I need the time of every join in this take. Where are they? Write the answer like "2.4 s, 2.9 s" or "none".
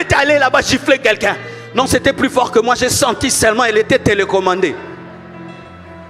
none